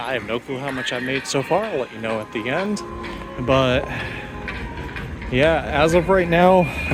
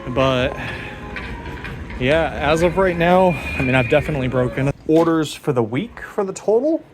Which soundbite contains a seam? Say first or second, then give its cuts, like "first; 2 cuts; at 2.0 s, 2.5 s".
second; 1 cut; at 4.7 s